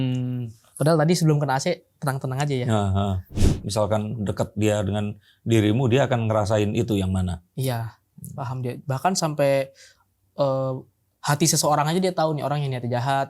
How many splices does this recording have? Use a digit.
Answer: 1